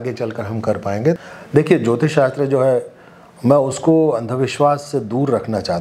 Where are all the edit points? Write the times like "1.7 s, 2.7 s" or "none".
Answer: 1.2 s